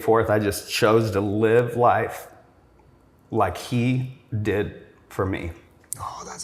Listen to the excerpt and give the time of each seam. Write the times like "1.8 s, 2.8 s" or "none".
none